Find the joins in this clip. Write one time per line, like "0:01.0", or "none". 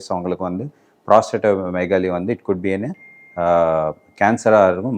none